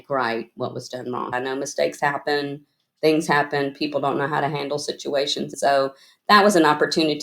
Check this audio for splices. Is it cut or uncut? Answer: cut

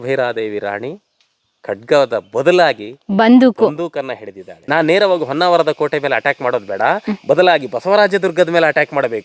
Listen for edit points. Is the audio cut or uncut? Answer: cut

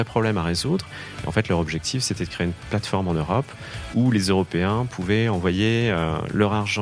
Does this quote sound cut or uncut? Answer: uncut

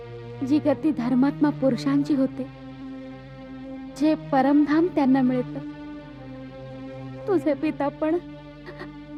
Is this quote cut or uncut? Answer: uncut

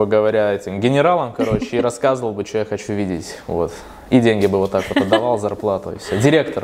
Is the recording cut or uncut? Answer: uncut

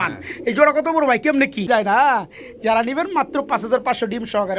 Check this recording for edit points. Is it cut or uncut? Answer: cut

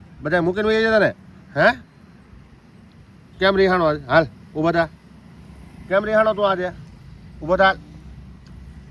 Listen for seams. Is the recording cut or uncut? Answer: uncut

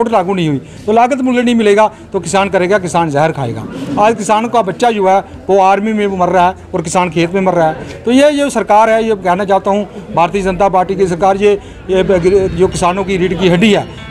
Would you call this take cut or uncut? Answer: uncut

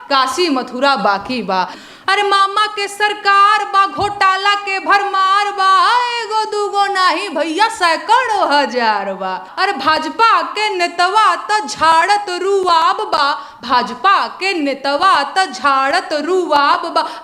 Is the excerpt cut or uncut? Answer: cut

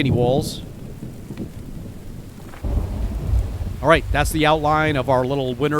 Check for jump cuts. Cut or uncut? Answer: cut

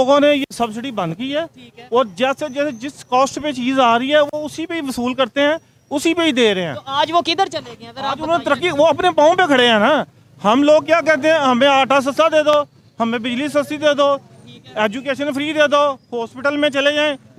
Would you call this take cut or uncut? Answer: uncut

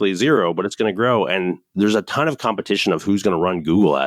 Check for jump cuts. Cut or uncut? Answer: cut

